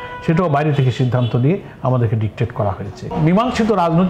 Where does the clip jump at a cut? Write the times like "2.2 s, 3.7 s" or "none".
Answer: 3.1 s